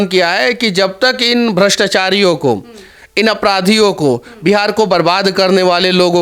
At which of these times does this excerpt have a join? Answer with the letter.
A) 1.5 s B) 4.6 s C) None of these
C